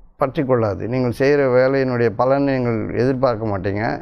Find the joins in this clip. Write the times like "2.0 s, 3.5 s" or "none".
none